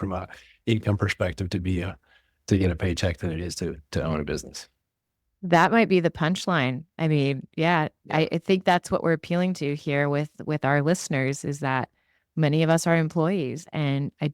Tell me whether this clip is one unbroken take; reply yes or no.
yes